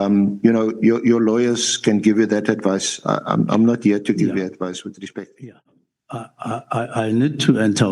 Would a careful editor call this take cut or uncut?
cut